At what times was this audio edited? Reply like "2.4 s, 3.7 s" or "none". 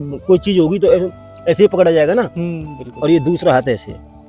none